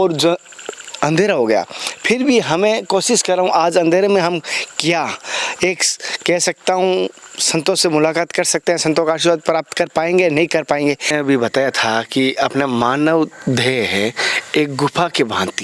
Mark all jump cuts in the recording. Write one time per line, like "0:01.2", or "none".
0:11.1